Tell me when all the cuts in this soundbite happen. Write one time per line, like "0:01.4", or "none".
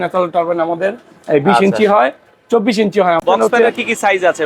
0:03.2